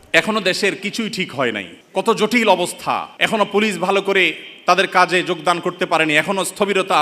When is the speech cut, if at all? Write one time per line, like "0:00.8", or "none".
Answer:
0:01.7
0:03.1